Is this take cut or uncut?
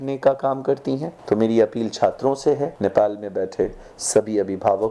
uncut